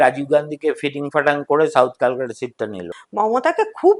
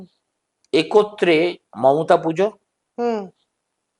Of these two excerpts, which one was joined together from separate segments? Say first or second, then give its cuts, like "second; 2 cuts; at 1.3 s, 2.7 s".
first; 1 cut; at 3.0 s